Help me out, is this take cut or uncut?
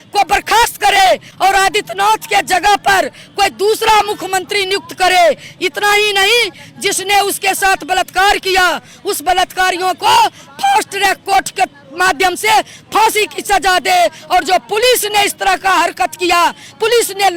uncut